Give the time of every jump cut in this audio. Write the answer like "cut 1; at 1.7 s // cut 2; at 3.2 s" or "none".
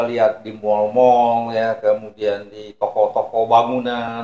none